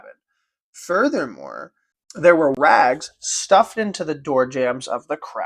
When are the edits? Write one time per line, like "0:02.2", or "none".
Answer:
0:02.6